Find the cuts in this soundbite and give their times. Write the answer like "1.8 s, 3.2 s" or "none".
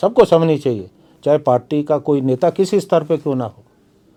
none